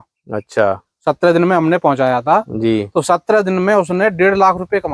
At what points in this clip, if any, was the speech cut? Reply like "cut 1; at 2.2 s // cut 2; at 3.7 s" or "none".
none